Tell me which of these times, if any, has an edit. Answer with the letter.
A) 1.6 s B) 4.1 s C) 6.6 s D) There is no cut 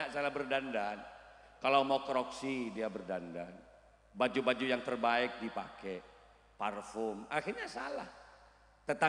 D